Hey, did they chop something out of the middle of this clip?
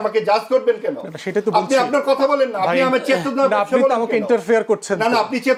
no; 0 cuts

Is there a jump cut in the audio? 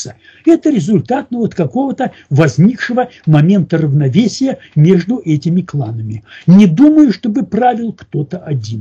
no; 0 cuts

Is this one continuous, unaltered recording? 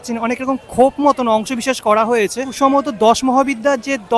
no; 1 cut; at 2.5 s

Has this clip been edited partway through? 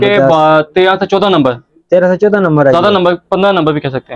no; 0 cuts

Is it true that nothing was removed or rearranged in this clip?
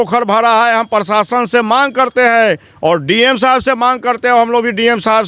yes; 0 cuts

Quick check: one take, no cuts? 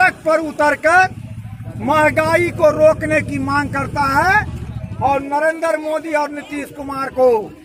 yes; 0 cuts

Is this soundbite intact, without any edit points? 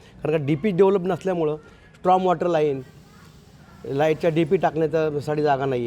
yes; 0 cuts

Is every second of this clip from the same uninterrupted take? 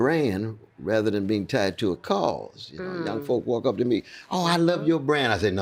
yes; 0 cuts

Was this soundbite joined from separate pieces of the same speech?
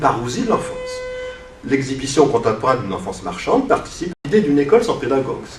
no; 0 cuts

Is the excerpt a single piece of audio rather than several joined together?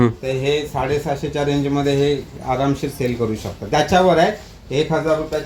yes; 0 cuts

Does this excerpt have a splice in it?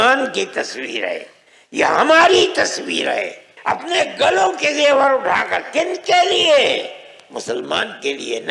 yes; 1 cut; at 3.5 s

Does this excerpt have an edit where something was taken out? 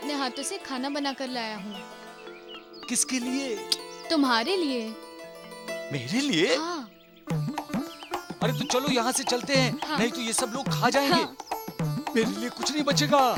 no; 0 cuts

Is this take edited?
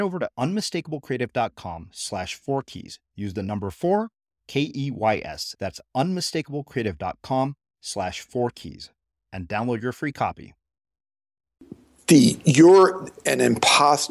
yes; 1 cut; at 11.9 s

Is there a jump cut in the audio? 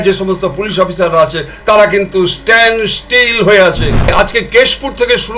yes; 1 cut; at 4.1 s

